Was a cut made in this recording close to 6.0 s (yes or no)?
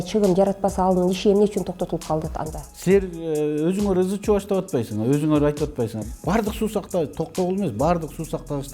yes